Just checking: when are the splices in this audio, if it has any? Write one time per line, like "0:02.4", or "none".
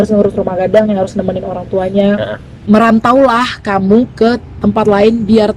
0:02.5